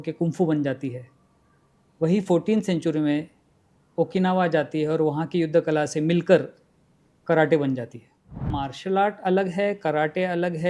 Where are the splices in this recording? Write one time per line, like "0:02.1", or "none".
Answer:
0:08.5